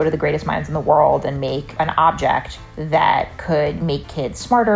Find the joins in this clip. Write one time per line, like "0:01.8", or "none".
0:01.7